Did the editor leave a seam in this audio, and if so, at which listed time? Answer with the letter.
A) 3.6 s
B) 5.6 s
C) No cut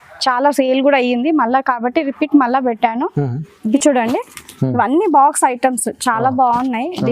A